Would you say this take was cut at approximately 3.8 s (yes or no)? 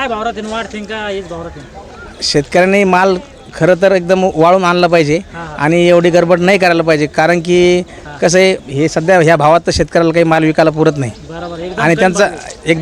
no